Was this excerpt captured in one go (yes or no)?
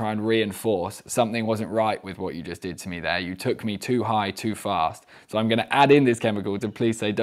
yes